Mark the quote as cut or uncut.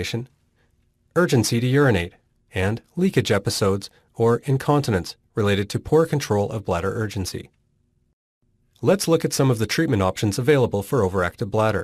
uncut